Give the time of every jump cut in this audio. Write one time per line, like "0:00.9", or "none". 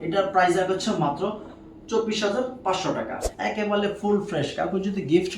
0:03.2